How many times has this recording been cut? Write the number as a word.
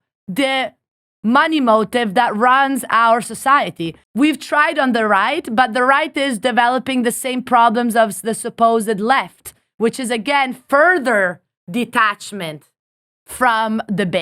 one